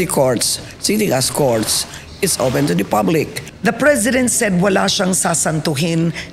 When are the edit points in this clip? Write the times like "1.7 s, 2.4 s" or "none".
3.4 s